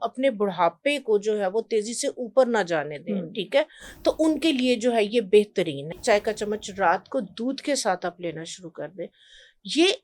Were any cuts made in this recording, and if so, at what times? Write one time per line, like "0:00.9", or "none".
0:06.0